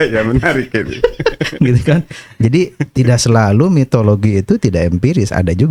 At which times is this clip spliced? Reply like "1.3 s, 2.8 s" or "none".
none